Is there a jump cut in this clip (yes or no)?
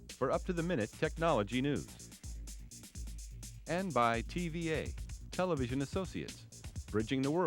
yes